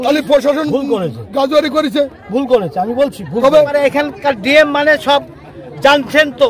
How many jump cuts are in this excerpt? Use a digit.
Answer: 1